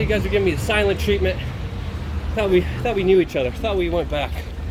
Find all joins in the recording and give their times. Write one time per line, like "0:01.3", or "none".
none